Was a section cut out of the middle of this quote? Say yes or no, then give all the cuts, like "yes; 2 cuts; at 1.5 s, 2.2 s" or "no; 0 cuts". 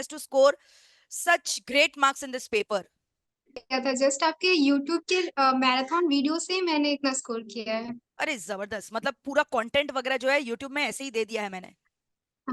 yes; 1 cut; at 3.6 s